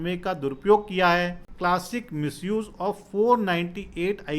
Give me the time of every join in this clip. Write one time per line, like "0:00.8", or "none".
0:01.5